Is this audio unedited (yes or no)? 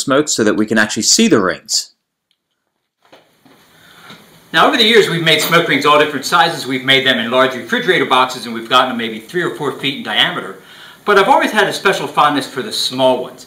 yes